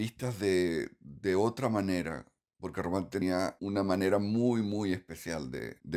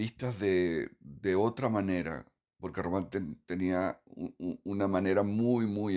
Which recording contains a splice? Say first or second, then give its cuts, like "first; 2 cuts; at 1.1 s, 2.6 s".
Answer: first; 1 cut; at 3.4 s